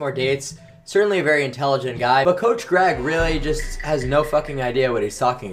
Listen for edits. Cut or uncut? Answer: uncut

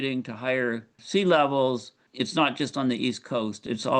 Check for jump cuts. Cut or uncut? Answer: cut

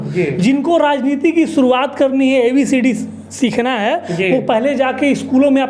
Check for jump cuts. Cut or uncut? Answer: uncut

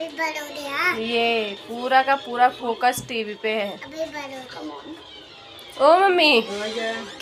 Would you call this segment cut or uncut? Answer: uncut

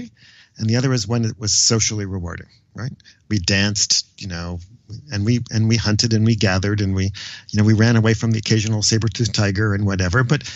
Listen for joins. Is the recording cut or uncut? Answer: uncut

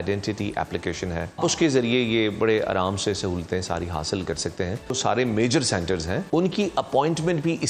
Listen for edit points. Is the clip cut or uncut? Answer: cut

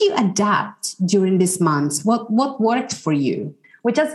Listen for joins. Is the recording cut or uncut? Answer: uncut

